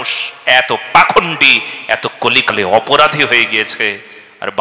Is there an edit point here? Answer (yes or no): no